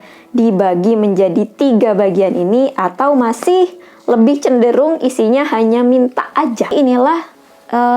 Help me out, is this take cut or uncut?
cut